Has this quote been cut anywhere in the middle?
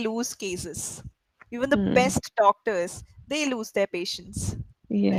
no; 0 cuts

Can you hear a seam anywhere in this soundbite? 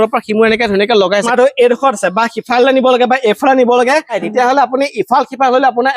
yes; 2 cuts; at 1.3 s, 4.2 s

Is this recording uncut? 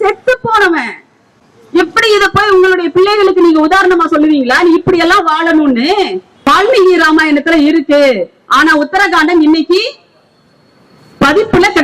no; 1 cut; at 6.5 s

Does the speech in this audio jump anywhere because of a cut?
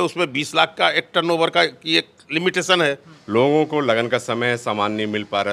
yes; 1 cut; at 3.1 s

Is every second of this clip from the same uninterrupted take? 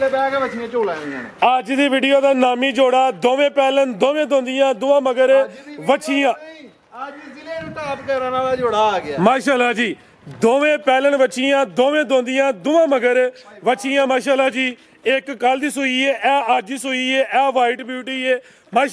yes; 0 cuts

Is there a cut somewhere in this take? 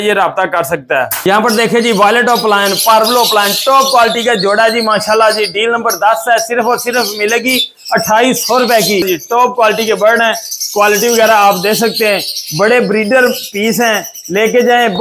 yes; 2 cuts; at 1.2 s, 9.1 s

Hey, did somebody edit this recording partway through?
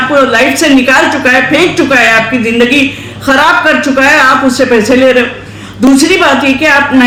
no; 0 cuts

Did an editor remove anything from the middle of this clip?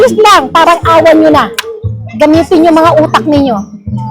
no; 0 cuts

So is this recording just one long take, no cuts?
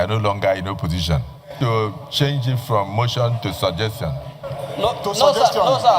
no; 1 cut; at 1.5 s

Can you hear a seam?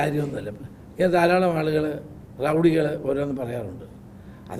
no; 0 cuts

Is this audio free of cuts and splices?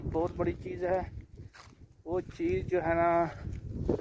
yes; 0 cuts

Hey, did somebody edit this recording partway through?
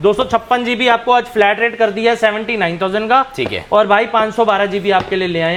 no; 0 cuts

